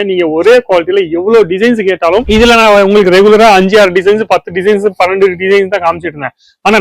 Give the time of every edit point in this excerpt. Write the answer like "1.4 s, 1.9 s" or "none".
2.2 s